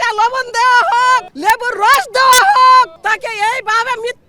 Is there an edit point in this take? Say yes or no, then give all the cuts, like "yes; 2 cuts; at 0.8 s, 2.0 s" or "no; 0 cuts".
yes; 2 cuts; at 1.3 s, 3.0 s